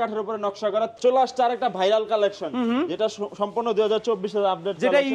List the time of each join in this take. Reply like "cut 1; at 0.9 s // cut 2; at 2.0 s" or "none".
cut 1; at 0.9 s